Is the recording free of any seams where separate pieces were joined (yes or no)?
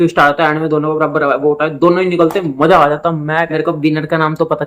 no